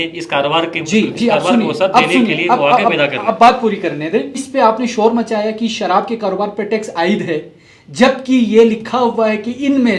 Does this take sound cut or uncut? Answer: cut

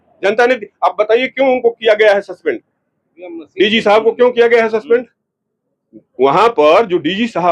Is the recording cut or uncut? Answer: uncut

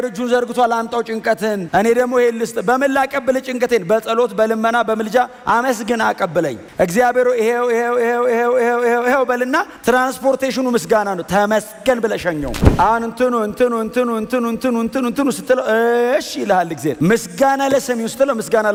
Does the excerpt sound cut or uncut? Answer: uncut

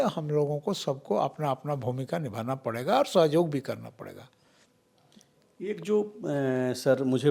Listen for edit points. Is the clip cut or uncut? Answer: uncut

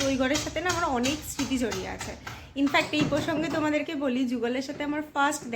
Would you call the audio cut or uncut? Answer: uncut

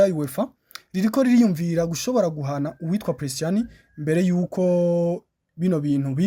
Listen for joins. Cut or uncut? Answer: uncut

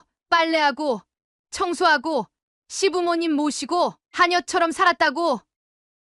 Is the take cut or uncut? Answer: uncut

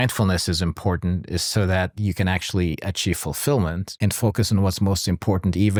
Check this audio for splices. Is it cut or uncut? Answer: uncut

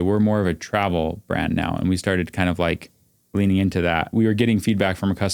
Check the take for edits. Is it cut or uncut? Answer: cut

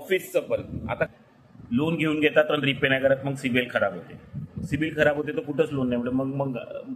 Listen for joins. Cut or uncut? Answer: cut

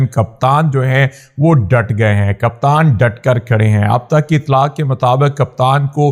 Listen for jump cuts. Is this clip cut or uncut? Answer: uncut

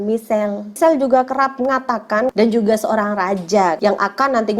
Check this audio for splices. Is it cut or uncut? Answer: cut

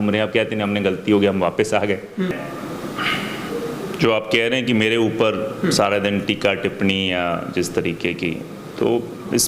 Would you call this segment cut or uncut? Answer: cut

